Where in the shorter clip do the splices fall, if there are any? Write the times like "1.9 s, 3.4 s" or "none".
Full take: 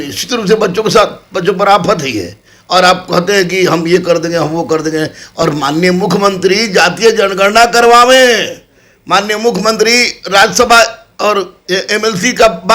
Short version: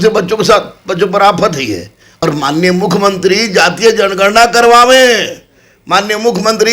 2.1 s